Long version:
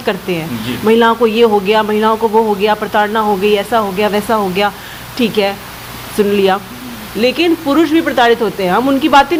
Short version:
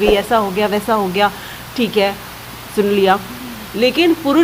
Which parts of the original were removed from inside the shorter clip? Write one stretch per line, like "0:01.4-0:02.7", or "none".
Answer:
none